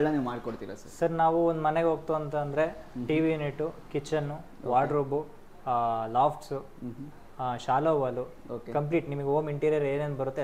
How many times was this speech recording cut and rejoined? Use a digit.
0